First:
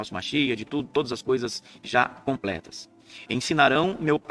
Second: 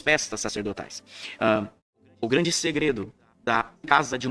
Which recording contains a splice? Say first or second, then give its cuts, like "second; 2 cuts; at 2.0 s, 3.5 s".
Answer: second; 1 cut; at 1.9 s